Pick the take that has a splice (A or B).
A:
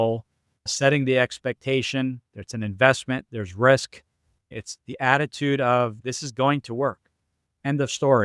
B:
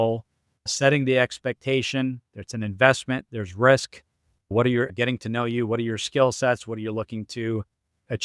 A